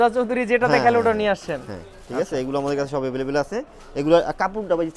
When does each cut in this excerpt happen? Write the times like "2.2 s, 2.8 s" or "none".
none